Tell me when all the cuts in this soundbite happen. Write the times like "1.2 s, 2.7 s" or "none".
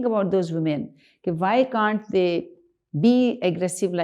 none